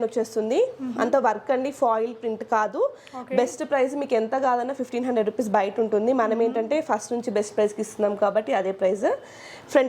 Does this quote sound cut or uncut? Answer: uncut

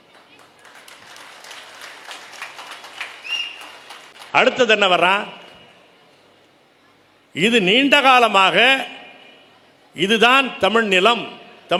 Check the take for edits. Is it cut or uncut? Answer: uncut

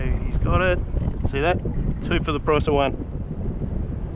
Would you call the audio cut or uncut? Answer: uncut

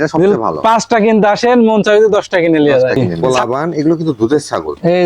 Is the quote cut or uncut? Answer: cut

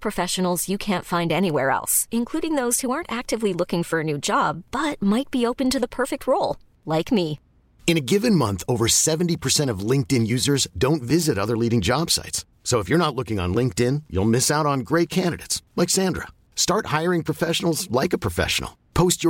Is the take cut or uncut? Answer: uncut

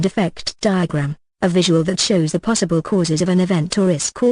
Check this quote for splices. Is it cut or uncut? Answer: cut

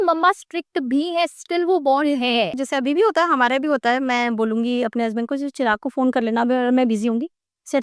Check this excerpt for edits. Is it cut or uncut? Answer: uncut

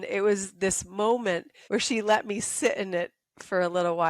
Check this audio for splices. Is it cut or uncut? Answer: cut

